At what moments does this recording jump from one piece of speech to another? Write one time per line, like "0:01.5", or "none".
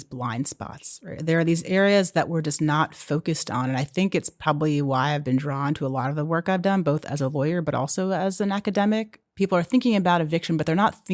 0:09.2